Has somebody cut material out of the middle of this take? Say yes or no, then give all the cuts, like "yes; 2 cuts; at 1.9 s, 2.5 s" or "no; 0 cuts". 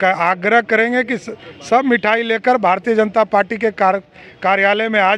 no; 0 cuts